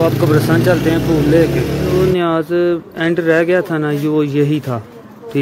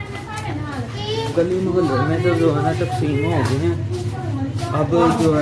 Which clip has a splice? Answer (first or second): first